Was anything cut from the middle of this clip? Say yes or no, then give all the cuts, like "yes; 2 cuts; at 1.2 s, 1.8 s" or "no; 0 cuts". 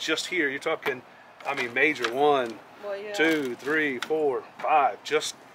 no; 0 cuts